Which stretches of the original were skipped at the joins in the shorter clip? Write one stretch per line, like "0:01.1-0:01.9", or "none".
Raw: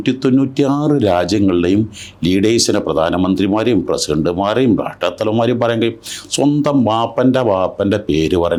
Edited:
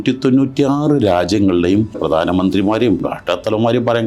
0:02.0-0:02.8
0:03.9-0:04.8